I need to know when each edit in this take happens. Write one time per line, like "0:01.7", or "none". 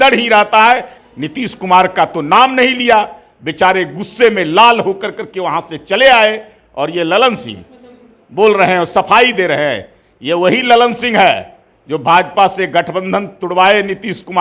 0:01.0